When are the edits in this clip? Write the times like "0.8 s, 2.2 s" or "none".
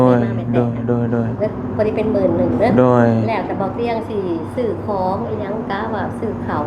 none